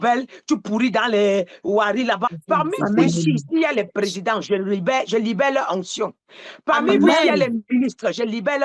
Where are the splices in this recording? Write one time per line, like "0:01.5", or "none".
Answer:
0:02.3